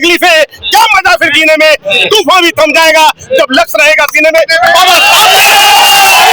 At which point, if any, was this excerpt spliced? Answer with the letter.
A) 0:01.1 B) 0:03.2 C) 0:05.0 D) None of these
D